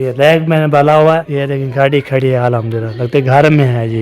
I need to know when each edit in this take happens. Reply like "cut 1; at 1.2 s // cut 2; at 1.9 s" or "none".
cut 1; at 1.2 s